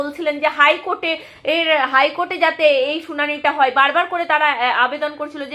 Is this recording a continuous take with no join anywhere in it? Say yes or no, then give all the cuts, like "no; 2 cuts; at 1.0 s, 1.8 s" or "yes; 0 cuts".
yes; 0 cuts